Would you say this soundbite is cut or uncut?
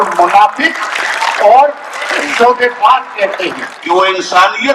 cut